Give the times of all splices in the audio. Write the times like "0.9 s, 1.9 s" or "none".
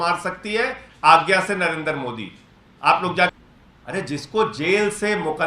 3.3 s